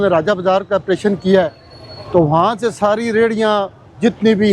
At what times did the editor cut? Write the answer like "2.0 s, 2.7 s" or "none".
none